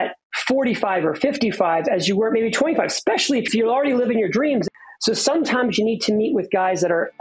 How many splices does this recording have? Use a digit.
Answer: 2